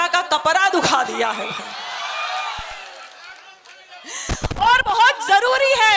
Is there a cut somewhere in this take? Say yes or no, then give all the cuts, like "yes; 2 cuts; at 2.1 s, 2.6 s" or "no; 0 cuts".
no; 0 cuts